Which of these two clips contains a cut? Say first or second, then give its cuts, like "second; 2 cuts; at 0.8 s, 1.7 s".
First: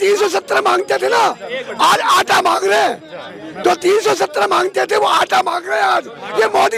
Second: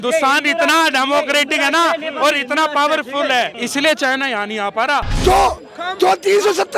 second; 2 cuts; at 3.6 s, 5.1 s